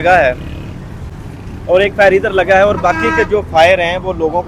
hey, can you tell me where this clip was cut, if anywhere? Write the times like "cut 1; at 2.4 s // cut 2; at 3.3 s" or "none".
none